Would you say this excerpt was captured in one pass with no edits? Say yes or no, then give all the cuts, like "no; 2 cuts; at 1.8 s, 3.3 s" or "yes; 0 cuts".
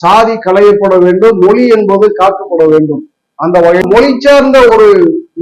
no; 1 cut; at 3.8 s